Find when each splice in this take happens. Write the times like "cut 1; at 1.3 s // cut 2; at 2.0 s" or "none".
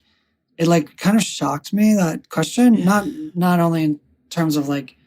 cut 1; at 3.2 s